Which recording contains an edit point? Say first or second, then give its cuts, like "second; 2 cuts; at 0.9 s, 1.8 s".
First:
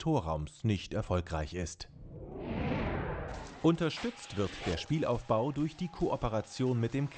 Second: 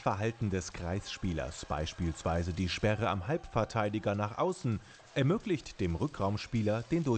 first; 1 cut; at 3.2 s